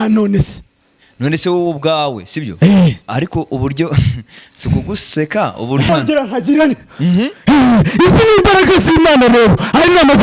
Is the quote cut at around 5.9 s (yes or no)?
yes